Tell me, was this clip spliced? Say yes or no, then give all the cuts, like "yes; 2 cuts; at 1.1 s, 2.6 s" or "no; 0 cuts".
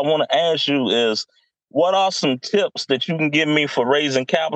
no; 0 cuts